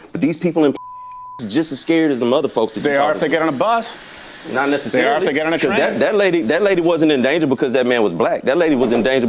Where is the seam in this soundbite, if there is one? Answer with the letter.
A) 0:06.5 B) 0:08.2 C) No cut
A